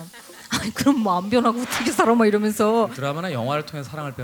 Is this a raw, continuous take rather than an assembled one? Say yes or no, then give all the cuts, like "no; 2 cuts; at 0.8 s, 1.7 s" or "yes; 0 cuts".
no; 1 cut; at 3.0 s